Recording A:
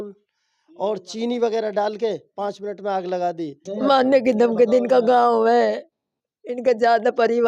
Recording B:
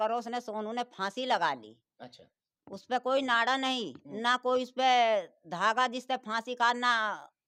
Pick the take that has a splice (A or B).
A